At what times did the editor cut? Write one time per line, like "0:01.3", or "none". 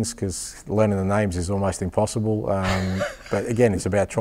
none